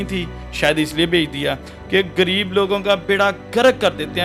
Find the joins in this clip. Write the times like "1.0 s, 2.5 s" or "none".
none